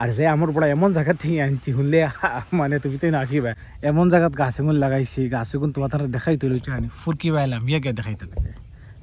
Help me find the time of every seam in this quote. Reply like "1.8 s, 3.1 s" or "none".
3.7 s